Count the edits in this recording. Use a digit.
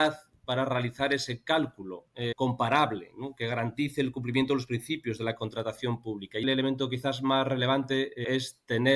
3